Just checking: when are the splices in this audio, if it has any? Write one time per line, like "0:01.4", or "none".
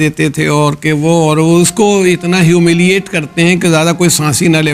none